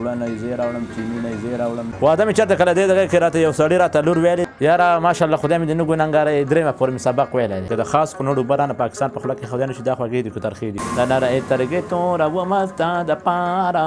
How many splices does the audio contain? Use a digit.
4